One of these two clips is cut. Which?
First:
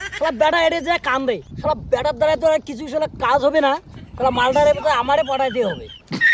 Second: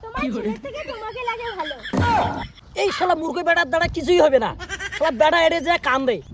second; 1 cut; at 2.6 s

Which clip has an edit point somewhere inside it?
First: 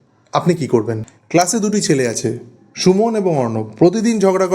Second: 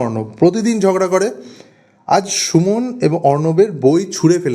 first; 1 cut; at 1.1 s

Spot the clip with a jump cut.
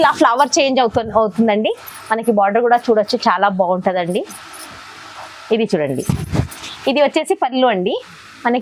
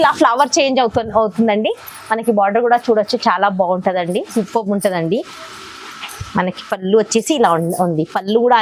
second; 1 cut; at 4.3 s

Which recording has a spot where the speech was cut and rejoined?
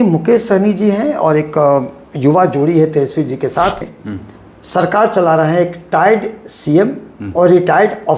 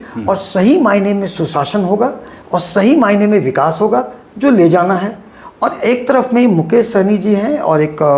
first; 1 cut; at 3.9 s

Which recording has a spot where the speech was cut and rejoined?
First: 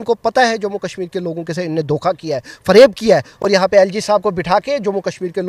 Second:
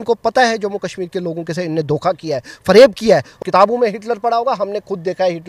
second; 1 cut; at 3.3 s

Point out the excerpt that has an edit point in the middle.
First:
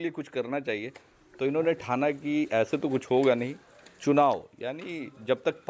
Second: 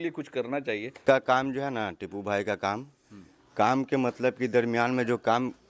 second; 1 cut; at 1.0 s

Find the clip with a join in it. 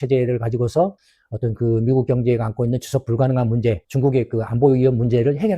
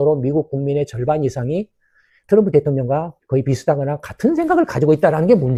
first; 1 cut; at 3.8 s

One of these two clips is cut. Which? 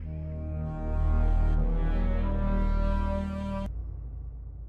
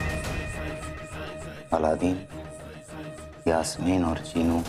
first; 1 cut; at 3.7 s

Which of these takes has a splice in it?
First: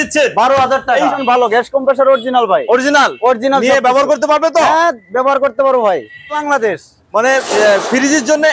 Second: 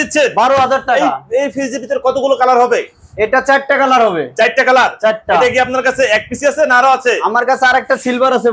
first; 2 cuts; at 1.2 s, 6.4 s

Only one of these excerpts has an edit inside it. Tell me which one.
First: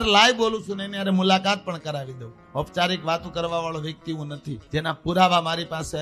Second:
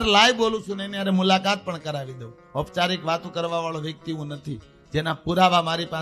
first; 1 cut; at 4.5 s

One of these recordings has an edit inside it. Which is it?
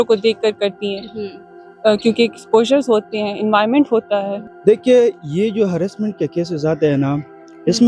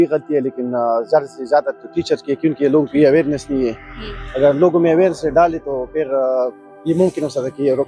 first; 1 cut; at 4.4 s

